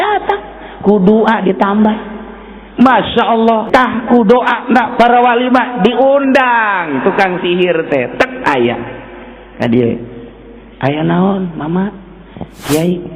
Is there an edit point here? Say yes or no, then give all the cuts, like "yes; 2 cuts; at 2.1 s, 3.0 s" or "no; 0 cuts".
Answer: yes; 1 cut; at 3.6 s